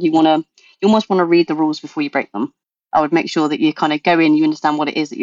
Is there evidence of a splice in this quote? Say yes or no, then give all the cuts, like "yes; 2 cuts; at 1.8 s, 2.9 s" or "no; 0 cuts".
yes; 1 cut; at 2.7 s